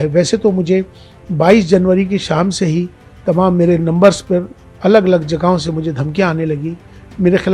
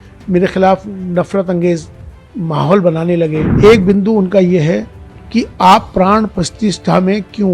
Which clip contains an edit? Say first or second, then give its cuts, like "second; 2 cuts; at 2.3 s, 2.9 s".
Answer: second; 1 cut; at 3.5 s